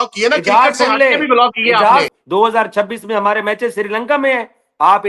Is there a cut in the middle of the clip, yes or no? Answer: yes